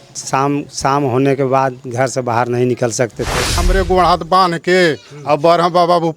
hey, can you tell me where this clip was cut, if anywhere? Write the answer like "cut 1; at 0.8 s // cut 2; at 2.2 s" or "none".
cut 1; at 3.7 s